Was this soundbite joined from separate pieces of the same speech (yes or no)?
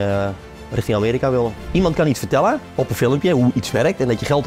yes